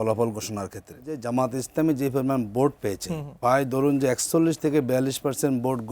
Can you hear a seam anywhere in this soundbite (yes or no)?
yes